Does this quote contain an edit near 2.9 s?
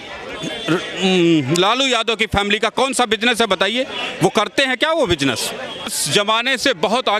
no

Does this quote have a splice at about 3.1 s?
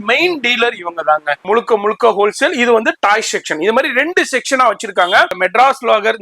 no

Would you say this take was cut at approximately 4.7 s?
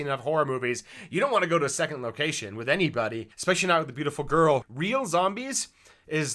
yes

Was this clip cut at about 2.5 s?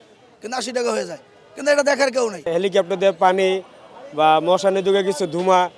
yes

